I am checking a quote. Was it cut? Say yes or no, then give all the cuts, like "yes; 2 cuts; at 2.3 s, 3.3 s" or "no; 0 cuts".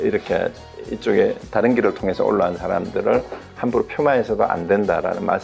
no; 0 cuts